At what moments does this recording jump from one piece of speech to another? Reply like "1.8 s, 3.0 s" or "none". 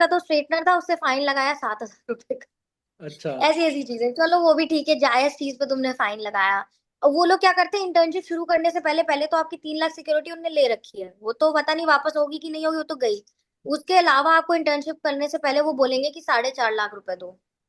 none